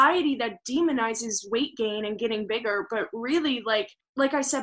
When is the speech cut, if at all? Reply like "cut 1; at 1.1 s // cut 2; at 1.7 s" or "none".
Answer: none